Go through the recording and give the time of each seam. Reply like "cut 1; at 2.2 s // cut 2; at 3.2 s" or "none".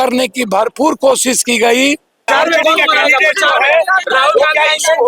cut 1; at 2.3 s